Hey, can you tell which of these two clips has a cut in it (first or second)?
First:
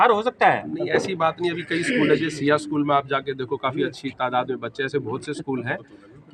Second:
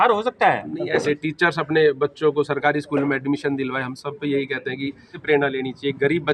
second